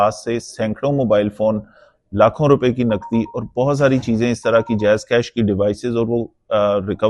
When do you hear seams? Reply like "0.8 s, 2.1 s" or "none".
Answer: none